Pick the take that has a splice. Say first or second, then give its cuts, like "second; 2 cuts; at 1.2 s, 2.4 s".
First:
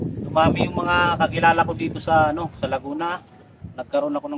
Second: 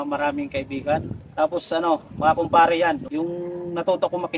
second; 2 cuts; at 1.2 s, 3.0 s